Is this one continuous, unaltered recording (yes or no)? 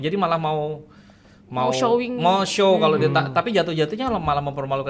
yes